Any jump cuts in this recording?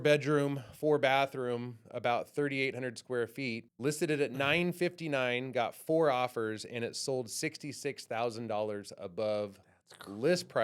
yes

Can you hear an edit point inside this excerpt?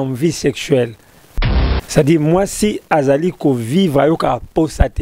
yes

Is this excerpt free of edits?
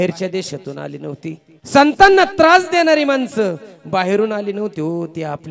no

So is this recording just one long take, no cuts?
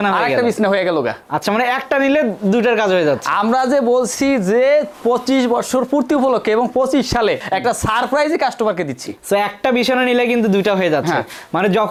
yes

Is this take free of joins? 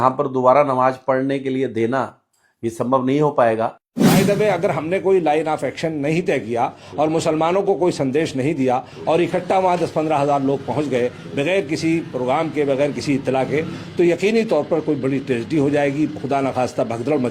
no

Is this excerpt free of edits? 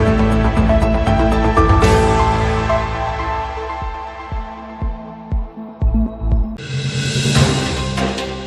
no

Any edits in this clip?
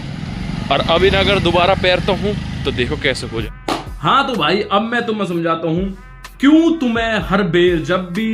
yes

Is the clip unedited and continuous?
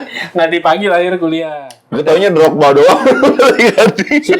no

